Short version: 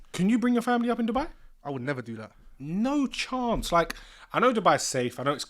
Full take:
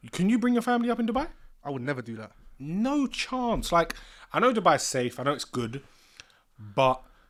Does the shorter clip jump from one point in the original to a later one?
no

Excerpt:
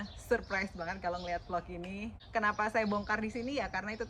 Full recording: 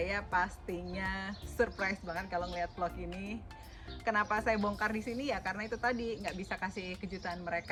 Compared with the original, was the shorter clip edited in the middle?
yes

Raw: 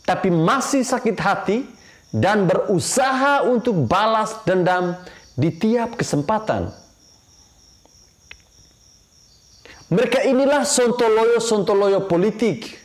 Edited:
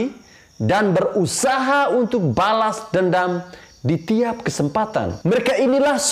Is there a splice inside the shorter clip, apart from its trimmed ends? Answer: yes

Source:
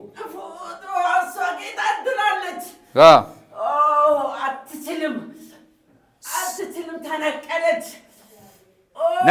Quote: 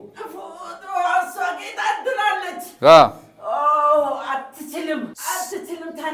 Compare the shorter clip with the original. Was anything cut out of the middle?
yes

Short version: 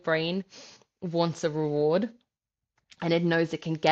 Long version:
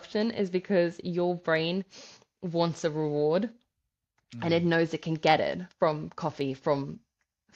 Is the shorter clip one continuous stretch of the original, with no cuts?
yes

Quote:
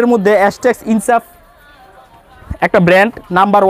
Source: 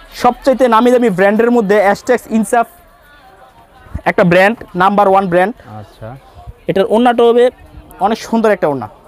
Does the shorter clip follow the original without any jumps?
yes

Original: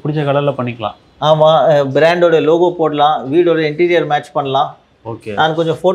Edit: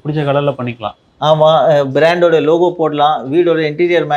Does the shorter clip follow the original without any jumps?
yes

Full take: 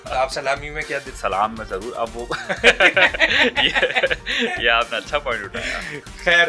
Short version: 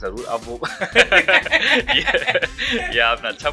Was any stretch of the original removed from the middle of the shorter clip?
no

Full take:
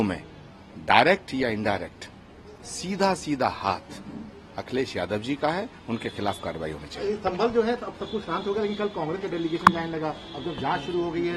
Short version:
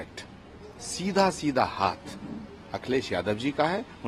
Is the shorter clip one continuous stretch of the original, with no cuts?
yes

